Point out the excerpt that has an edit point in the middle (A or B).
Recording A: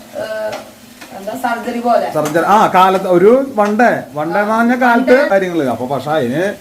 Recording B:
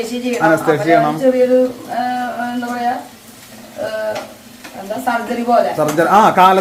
A